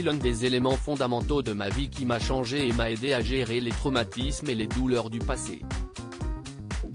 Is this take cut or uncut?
cut